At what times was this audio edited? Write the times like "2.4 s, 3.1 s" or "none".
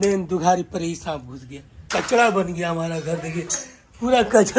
1.9 s